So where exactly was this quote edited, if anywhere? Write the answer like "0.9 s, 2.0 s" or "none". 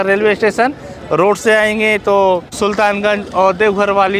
2.5 s